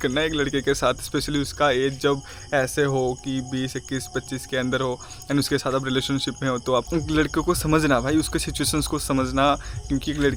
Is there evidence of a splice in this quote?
yes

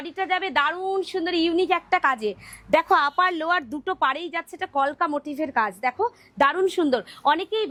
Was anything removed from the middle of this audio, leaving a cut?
no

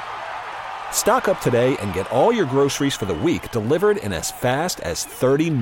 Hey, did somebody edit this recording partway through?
no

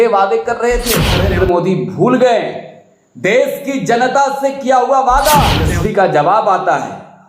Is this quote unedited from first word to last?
no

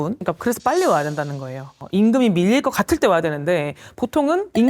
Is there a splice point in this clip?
no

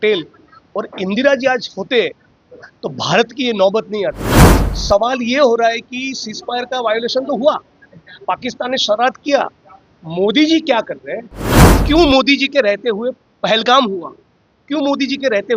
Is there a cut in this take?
no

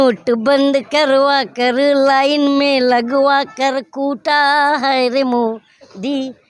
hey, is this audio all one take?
yes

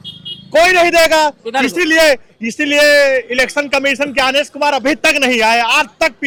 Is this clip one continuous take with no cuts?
yes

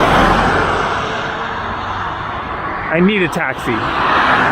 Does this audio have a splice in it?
no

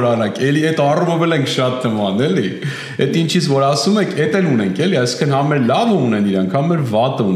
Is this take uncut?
yes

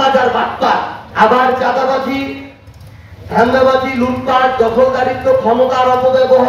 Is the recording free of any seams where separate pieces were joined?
no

